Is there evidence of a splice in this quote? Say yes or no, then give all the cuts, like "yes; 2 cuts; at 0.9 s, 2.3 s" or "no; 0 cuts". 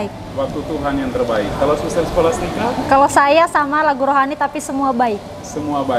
no; 0 cuts